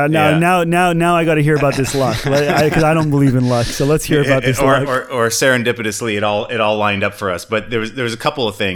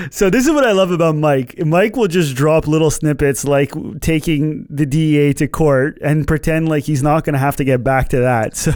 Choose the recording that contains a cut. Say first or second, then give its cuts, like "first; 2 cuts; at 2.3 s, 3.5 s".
first; 1 cut; at 4.9 s